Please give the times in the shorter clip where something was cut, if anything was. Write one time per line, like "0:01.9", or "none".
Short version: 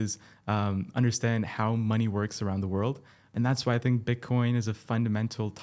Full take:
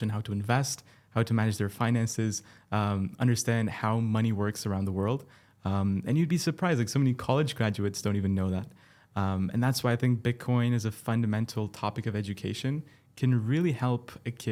0:03.3

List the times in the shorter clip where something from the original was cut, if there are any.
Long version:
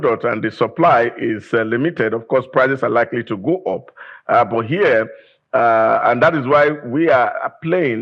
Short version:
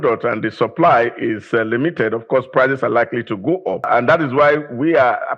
0:03.9

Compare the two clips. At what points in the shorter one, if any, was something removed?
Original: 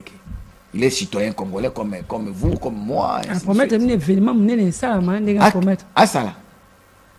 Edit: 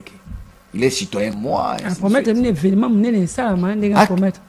0:01.4

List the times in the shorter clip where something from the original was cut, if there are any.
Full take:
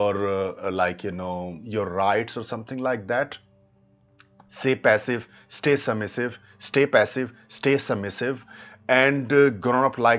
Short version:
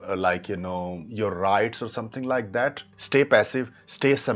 0:02.9

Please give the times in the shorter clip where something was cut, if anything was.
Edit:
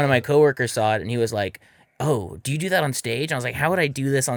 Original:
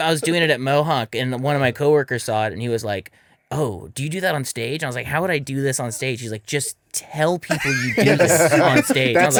none

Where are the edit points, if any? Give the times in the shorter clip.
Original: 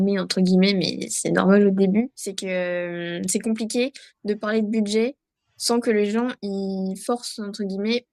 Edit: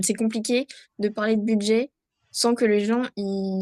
none

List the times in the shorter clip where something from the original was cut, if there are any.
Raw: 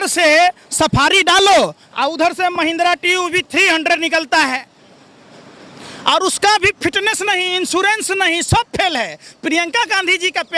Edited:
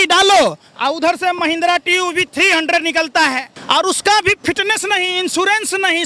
0:03.5

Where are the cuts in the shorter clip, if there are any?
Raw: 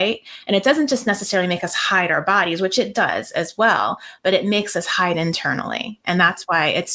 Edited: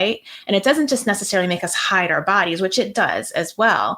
none

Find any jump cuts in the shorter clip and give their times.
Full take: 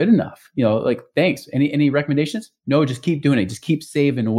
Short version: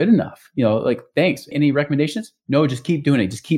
0:01.5

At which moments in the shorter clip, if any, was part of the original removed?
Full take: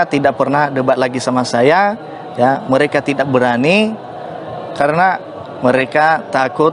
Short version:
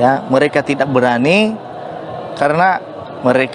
none

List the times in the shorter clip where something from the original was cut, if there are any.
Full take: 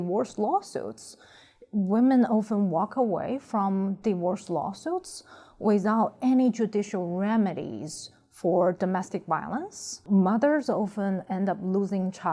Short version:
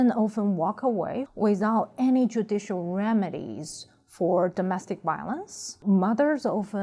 0:01.2

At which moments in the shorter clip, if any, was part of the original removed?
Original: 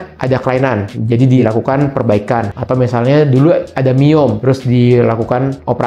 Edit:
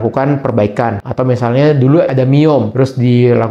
0:02.1

